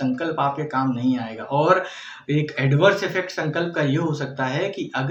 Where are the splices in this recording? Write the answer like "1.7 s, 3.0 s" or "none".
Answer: none